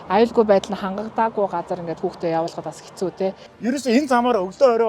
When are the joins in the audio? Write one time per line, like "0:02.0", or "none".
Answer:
0:03.4